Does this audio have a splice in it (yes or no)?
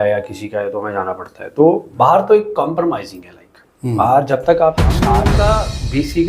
yes